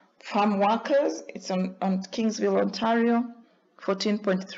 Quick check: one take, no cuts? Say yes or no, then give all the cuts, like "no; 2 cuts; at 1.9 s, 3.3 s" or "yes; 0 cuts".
yes; 0 cuts